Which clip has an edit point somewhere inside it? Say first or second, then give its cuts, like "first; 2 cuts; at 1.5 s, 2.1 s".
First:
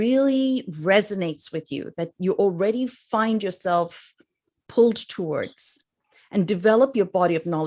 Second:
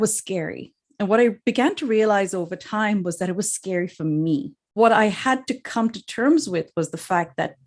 second; 1 cut; at 4.7 s